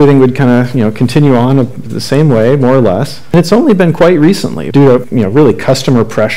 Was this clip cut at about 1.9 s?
no; 2 cuts; at 3.3 s, 4.8 s

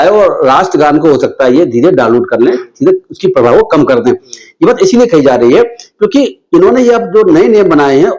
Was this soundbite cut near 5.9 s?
no; 0 cuts

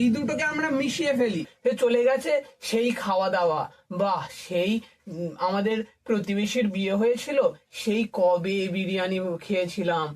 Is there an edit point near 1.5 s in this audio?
yes; 1 cut; at 1.5 s

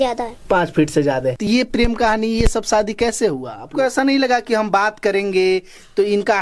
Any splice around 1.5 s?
yes; 2 cuts; at 1.5 s, 3.7 s

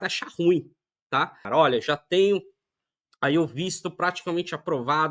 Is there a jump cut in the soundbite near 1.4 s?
yes; 1 cut; at 1.4 s

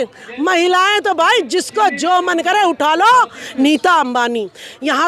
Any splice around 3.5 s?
yes; 1 cut; at 3.5 s

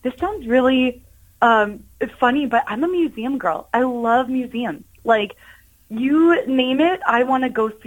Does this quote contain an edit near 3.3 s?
no; 0 cuts

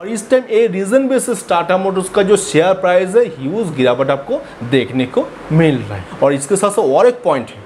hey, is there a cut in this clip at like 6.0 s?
yes; 1 cut; at 6.0 s

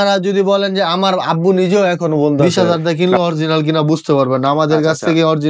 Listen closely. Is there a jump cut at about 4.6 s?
no; 1 cut; at 2.5 s

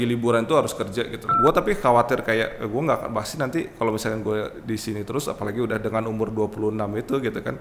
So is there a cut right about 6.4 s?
no; 1 cut; at 1.2 s

